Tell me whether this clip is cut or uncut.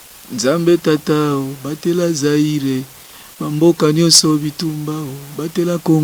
uncut